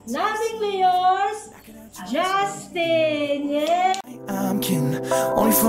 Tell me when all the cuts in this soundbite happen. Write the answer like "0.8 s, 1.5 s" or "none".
4.0 s